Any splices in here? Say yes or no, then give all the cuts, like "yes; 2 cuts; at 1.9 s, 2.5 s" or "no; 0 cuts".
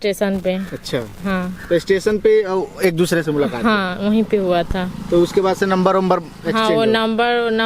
no; 0 cuts